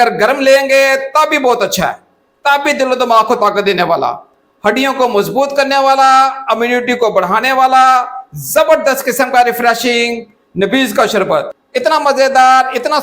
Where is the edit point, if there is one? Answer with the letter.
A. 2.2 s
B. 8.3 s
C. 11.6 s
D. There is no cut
C